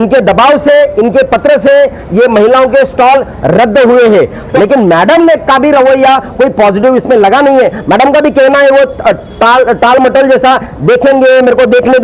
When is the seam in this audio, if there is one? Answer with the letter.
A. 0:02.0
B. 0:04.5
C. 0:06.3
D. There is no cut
B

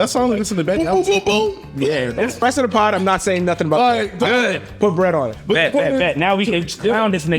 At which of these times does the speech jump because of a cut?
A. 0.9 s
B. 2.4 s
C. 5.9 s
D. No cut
B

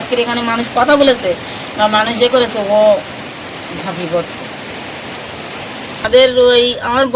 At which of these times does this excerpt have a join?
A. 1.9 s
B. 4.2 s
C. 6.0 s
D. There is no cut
C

